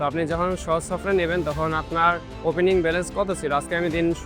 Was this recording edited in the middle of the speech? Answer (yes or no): no